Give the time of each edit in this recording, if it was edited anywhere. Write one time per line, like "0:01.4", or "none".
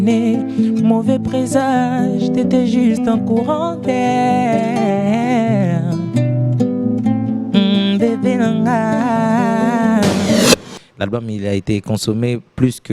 0:10.5